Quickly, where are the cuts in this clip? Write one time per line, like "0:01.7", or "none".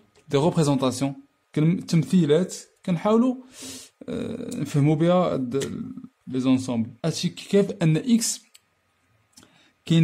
0:07.0